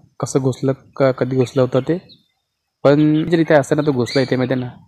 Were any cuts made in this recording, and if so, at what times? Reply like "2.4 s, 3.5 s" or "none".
3.3 s